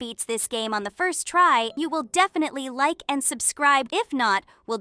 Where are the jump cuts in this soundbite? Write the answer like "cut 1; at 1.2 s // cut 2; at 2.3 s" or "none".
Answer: cut 1; at 1.8 s // cut 2; at 3.9 s